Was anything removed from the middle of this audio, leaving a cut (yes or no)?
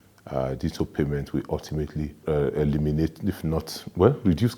yes